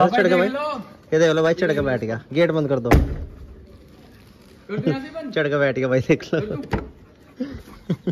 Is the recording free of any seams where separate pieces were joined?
yes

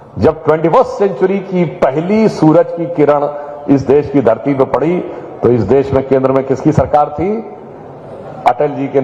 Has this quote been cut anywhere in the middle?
no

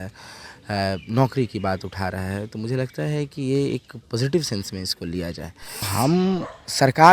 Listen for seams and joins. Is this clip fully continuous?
no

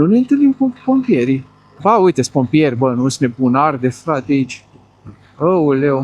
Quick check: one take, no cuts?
no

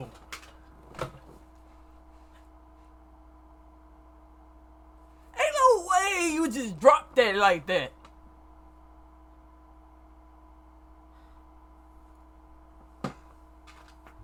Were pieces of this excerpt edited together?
no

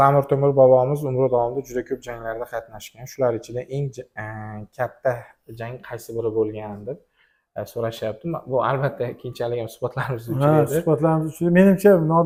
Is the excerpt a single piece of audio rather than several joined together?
yes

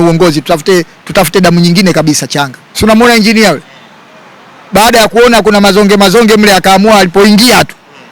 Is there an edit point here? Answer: yes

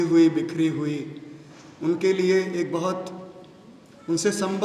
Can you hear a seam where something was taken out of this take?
no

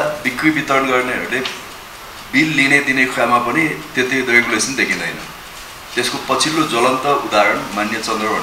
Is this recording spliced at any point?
no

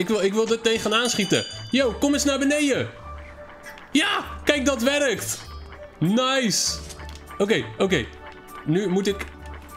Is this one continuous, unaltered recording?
yes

